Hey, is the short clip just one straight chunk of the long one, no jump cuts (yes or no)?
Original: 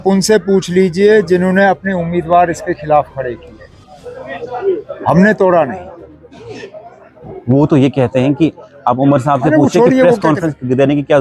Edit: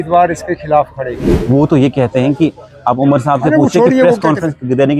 no